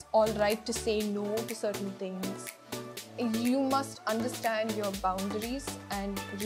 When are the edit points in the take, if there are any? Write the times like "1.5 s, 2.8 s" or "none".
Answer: none